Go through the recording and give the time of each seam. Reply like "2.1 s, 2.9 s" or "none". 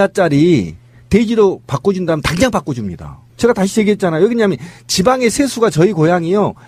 none